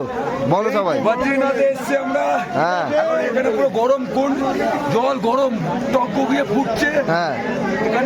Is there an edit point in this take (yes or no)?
no